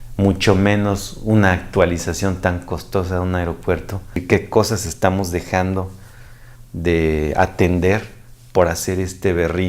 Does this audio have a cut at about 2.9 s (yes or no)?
no